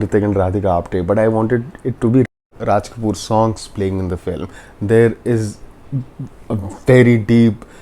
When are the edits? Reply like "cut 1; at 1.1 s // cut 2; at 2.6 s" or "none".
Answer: cut 1; at 2.4 s